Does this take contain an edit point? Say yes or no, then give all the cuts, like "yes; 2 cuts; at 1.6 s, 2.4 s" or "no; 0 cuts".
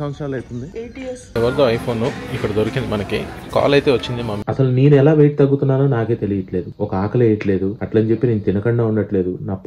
yes; 2 cuts; at 1.3 s, 4.4 s